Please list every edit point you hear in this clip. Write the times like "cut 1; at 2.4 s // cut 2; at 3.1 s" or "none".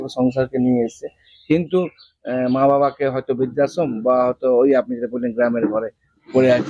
none